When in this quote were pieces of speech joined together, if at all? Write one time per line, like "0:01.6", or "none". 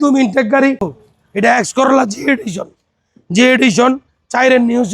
0:00.9